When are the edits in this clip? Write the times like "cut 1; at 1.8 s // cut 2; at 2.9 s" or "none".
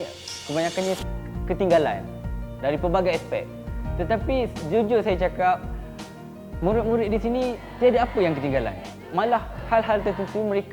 cut 1; at 9.3 s